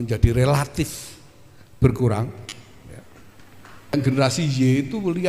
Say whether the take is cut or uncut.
cut